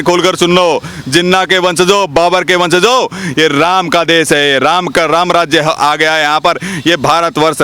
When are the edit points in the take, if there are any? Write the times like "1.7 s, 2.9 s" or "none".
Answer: none